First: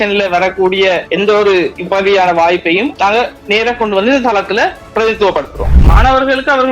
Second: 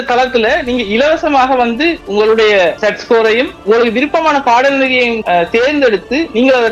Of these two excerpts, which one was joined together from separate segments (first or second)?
first